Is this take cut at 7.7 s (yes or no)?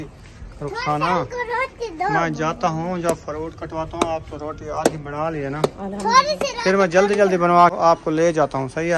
yes